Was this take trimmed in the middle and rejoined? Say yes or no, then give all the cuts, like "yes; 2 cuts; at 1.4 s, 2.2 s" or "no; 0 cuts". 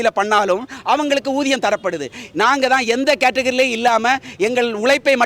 no; 0 cuts